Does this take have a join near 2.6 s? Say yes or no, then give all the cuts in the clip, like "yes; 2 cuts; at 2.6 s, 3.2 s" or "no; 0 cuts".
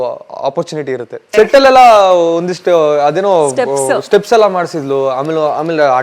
no; 1 cut; at 1.3 s